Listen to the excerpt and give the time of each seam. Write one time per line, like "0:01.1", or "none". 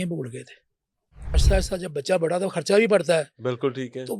0:01.4